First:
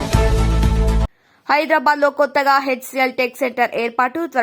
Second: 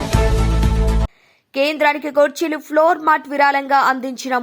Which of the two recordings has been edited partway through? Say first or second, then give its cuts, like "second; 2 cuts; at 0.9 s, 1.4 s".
second; 1 cut; at 1.2 s